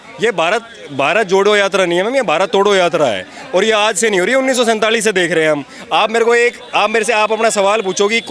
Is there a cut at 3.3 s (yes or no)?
no